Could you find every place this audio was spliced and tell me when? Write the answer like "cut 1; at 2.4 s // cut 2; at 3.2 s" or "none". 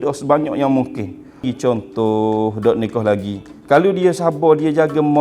cut 1; at 1.5 s